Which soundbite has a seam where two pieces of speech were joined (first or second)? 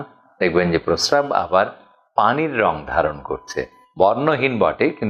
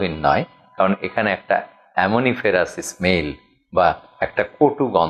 first